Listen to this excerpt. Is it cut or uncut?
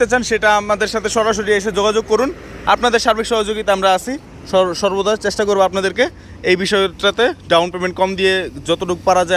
uncut